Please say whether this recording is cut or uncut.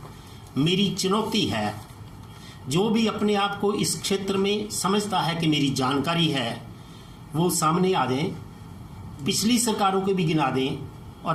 uncut